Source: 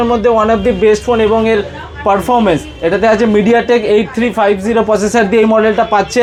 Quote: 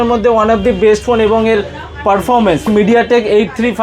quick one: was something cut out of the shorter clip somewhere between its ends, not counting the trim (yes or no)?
yes